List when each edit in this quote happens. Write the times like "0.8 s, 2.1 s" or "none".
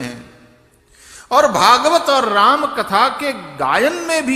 none